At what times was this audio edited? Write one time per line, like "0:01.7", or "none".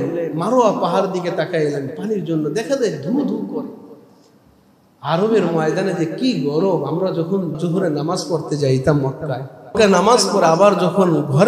0:07.6
0:09.7